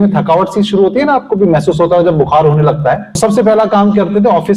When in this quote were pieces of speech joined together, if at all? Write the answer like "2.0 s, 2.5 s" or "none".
3.1 s